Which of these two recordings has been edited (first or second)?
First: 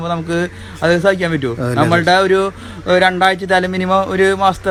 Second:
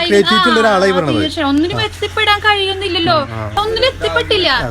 second